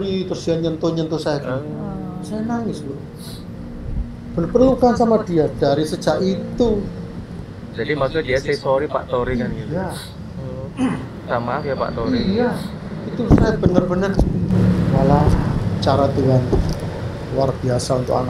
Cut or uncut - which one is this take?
uncut